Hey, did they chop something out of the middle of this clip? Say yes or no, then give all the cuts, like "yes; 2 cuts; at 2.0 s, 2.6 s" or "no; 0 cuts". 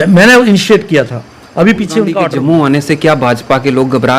yes; 1 cut; at 2.3 s